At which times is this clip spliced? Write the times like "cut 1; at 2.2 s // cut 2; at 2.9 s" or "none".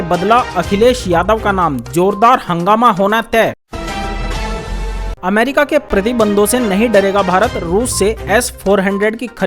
cut 1; at 3.6 s